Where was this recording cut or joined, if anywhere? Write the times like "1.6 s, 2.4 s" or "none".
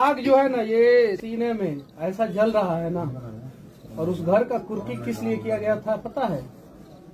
1.2 s